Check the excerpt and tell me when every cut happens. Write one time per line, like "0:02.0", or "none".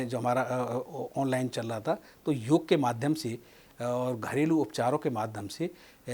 none